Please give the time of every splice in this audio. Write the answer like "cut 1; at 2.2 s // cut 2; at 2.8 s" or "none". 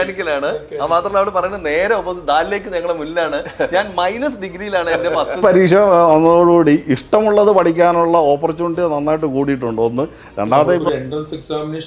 cut 1; at 5.4 s // cut 2; at 10.8 s